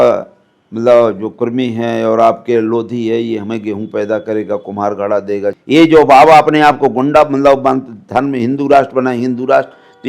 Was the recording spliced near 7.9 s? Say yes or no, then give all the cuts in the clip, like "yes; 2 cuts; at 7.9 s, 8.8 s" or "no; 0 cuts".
no; 1 cut; at 5.6 s